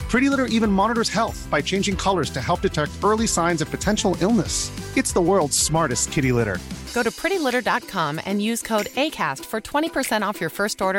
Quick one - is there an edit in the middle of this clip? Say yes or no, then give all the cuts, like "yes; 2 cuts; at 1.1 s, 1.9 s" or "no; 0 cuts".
no; 0 cuts